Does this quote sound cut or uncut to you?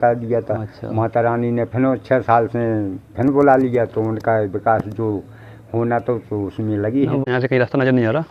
cut